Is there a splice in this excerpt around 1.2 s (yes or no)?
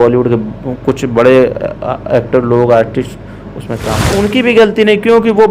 no